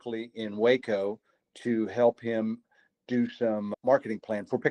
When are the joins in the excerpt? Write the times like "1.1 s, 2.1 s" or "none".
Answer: 3.7 s